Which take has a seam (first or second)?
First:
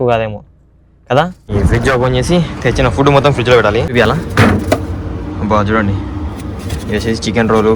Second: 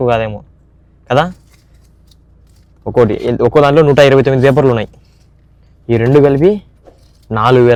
first